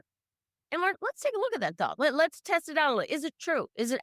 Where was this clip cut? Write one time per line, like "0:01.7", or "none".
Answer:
none

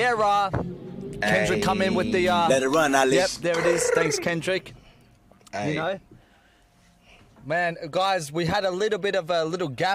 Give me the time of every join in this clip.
none

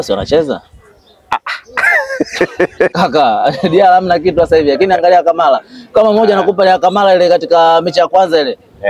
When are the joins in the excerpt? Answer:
0:02.9

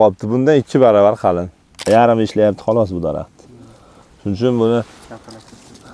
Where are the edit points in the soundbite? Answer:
0:01.8

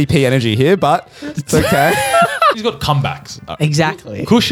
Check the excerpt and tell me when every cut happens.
0:02.6

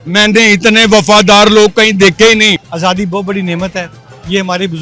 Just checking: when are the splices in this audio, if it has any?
0:02.6

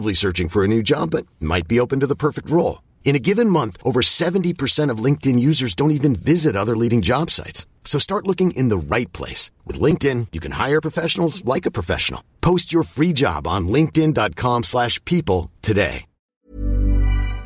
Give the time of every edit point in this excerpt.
0:16.4

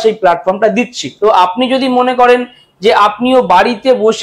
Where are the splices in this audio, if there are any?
0:01.0

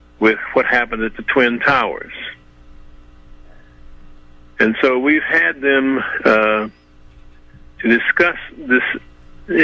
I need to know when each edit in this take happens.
none

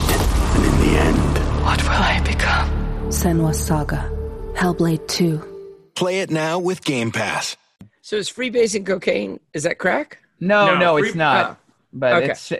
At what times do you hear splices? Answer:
0:07.9

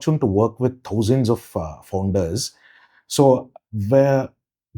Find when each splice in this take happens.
none

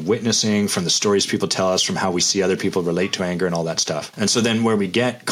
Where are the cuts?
0:04.1

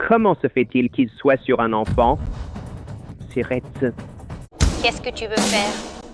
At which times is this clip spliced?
0:04.4

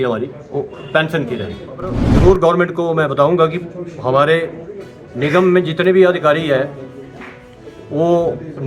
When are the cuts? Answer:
0:02.0

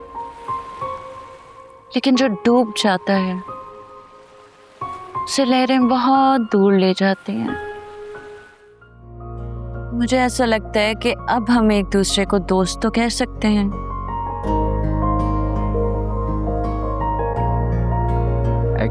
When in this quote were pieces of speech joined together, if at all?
0:09.2

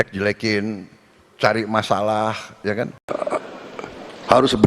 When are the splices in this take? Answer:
0:03.0

